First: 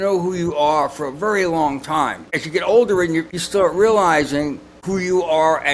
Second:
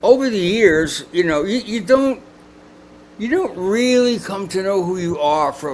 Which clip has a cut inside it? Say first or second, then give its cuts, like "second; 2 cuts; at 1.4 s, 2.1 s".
first; 3 cuts; at 2.3 s, 3.3 s, 4.8 s